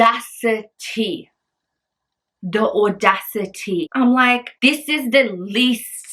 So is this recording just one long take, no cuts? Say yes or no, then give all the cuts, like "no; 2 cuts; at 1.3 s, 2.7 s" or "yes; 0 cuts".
no; 2 cuts; at 3.9 s, 4.5 s